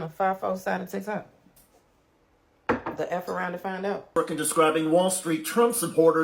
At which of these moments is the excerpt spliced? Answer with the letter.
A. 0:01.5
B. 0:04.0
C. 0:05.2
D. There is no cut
B